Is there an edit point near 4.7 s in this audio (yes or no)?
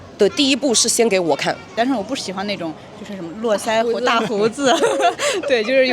no